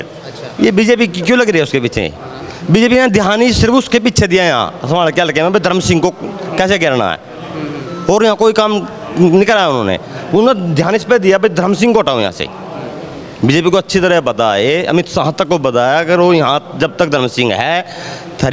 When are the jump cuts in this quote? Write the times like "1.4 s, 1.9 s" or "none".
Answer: none